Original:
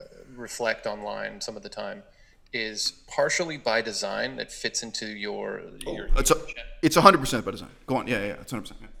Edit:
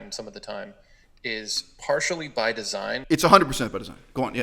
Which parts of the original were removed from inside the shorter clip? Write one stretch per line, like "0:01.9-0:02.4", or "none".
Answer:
0:04.3-0:06.7